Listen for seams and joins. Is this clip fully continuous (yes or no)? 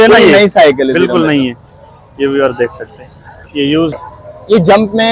no